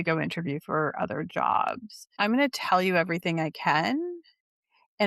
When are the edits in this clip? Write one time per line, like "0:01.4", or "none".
0:02.2

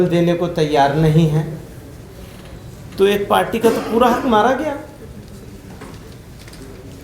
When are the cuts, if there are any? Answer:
none

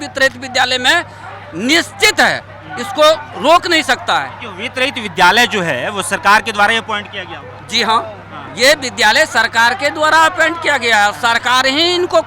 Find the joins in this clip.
none

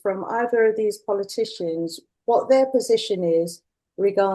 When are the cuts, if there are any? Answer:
0:02.0

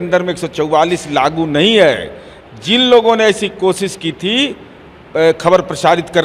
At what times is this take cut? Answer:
none

